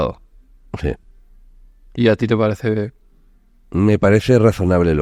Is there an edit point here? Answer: no; 0 cuts

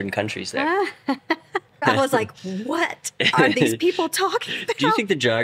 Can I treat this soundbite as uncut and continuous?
no; 1 cut; at 1.8 s

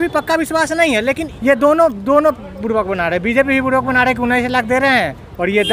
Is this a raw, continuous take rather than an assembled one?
no; 1 cut; at 1.3 s

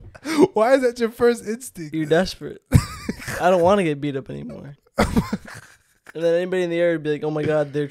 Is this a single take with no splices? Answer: no; 2 cuts; at 1.9 s, 4.8 s

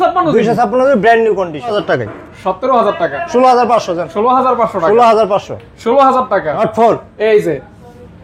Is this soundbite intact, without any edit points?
no; 2 cuts; at 1.7 s, 6.6 s

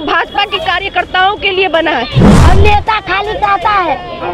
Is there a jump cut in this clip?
yes; 1 cut; at 2.3 s

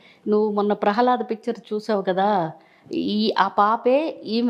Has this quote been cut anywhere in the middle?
no; 0 cuts

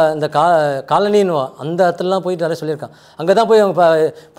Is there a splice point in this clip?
no; 0 cuts

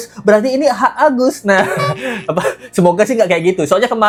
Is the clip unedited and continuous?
yes; 0 cuts

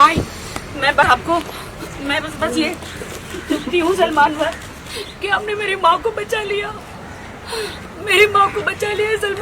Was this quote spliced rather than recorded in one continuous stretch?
yes; 1 cut; at 1.0 s

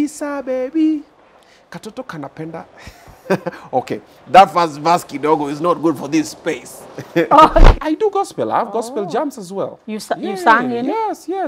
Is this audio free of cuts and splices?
no; 1 cut; at 7.8 s

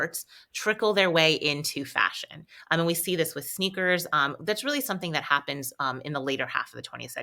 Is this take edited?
no; 0 cuts

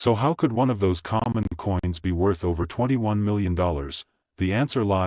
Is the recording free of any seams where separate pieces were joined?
yes; 0 cuts

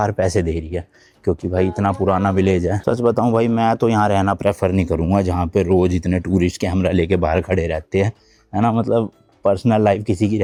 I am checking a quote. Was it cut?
no; 0 cuts

